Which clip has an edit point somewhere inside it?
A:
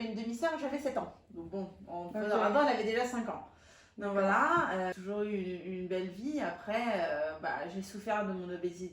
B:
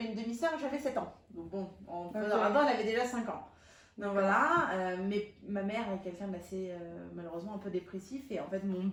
A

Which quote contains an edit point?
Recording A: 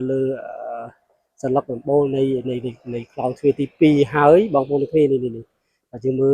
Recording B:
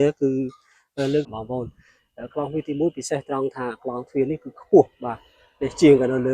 B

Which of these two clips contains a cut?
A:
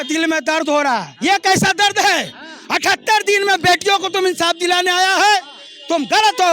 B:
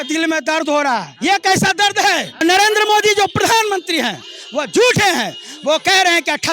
B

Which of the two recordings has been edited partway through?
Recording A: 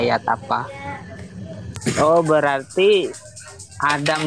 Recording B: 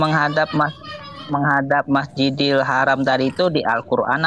A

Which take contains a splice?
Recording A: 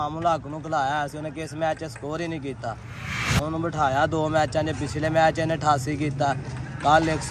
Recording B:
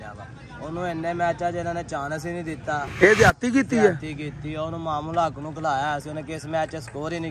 B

